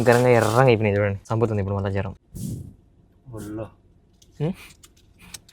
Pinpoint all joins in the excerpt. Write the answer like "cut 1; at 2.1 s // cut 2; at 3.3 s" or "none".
cut 1; at 1.2 s // cut 2; at 2.2 s